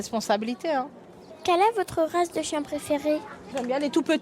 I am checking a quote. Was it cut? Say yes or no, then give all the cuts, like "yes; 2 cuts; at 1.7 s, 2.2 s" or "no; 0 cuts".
yes; 2 cuts; at 1.1 s, 3.3 s